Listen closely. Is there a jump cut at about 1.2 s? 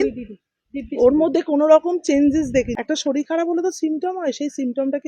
no; 1 cut; at 2.7 s

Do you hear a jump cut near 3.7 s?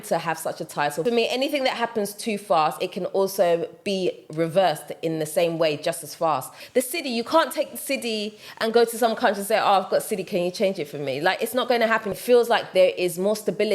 no; 3 cuts; at 1.0 s, 6.5 s, 12.1 s

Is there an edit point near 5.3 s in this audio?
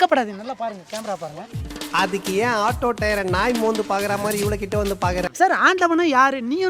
yes; 1 cut; at 5.3 s

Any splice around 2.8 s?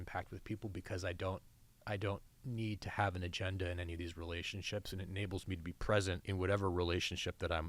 no; 1 cut; at 6.2 s

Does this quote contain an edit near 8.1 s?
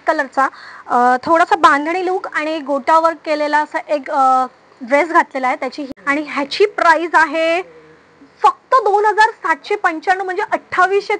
no; 1 cut; at 5.8 s

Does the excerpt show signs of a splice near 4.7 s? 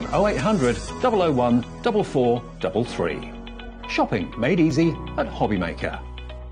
yes; 1 cut; at 4.7 s

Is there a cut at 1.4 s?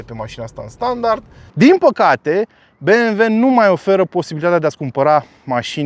yes; 1 cut; at 1.4 s

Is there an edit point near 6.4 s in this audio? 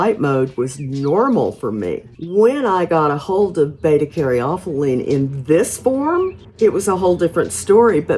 yes; 2 cuts; at 2.1 s, 6.4 s

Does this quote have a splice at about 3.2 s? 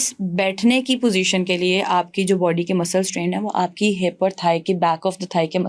no; 0 cuts

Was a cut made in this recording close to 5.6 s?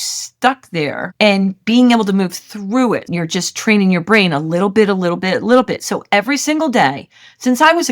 no; 1 cut; at 3.1 s

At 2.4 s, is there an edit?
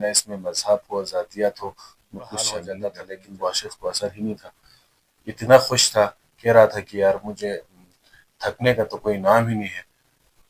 yes; 1 cut; at 2.4 s

